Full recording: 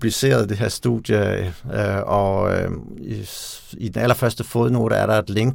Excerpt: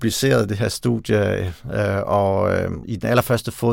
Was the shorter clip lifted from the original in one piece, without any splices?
no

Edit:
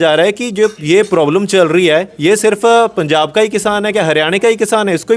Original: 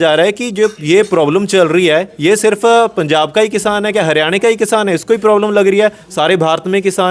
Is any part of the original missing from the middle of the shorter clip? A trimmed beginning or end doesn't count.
no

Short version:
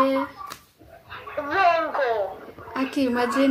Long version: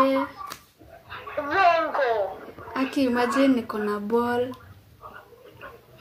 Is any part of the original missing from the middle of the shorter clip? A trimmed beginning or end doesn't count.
no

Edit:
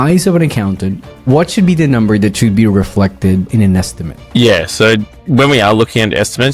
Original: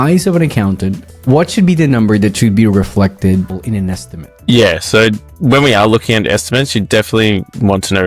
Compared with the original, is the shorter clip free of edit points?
no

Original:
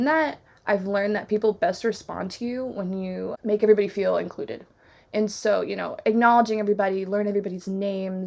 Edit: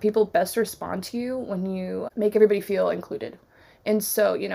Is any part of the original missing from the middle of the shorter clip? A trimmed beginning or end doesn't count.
no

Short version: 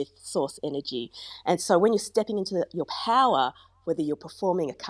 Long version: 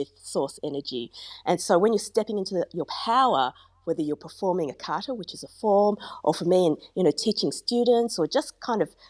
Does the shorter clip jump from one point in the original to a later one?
no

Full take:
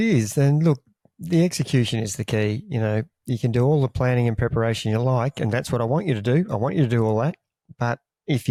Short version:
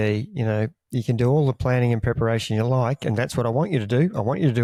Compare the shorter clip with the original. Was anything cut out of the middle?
no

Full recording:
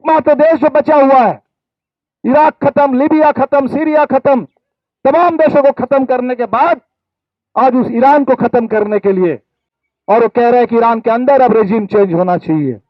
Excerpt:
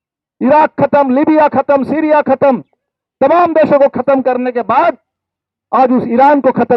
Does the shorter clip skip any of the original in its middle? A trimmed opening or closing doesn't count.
no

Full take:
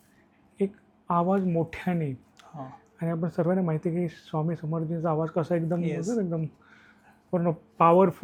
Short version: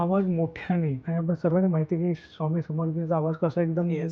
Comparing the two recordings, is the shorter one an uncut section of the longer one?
no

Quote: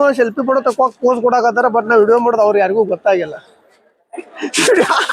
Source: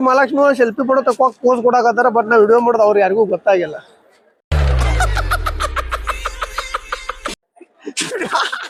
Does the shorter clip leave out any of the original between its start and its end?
yes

